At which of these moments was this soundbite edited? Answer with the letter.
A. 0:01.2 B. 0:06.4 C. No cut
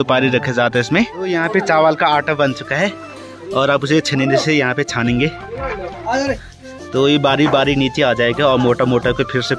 A